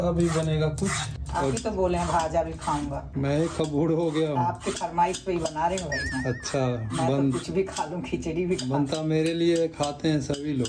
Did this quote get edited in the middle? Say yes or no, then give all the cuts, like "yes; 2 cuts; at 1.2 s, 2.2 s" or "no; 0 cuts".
yes; 1 cut; at 1.1 s